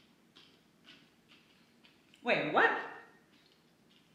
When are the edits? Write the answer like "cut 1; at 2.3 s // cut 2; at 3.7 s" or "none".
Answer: none